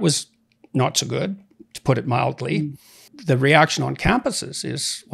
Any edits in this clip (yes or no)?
yes